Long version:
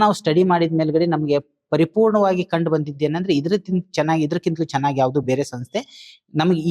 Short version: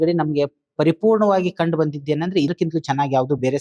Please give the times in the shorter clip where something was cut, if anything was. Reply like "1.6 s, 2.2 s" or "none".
2.5 s